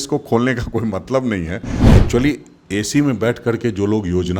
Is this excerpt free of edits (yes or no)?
no